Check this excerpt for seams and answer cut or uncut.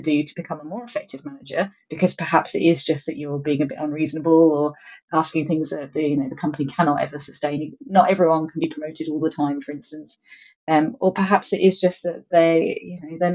uncut